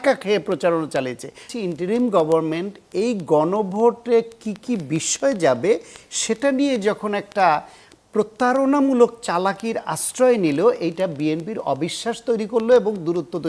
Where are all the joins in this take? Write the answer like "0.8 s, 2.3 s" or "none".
1.5 s